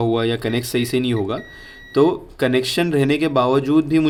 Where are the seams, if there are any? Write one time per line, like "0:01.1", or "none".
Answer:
none